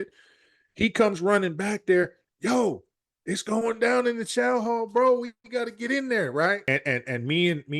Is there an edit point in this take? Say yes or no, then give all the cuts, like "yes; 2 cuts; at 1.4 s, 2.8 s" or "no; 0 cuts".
yes; 1 cut; at 6.6 s